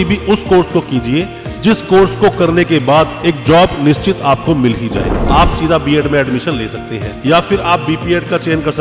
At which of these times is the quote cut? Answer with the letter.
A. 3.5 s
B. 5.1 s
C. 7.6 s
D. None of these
B